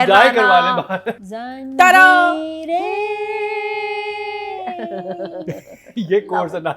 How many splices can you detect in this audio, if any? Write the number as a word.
one